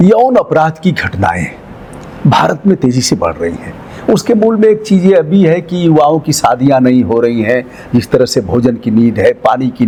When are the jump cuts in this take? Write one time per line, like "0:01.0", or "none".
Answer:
none

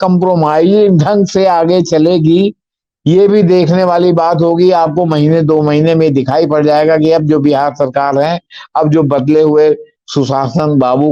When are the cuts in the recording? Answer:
none

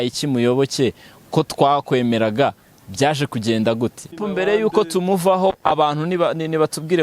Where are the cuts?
0:04.2

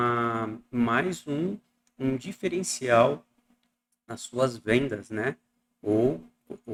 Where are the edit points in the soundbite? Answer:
none

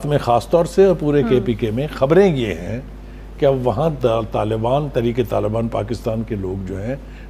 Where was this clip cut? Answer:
none

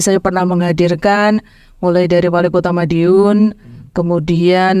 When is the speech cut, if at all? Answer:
none

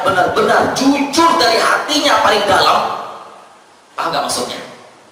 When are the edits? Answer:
none

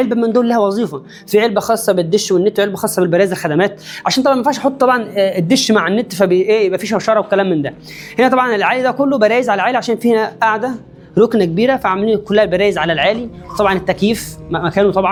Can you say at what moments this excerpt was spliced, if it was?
none

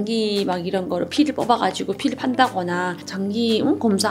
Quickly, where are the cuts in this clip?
0:03.1

